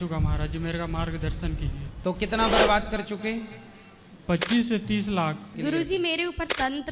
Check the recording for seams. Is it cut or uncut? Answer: cut